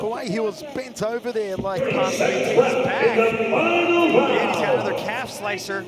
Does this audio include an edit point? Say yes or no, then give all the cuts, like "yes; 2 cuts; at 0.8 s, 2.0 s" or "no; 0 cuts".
yes; 1 cut; at 1.8 s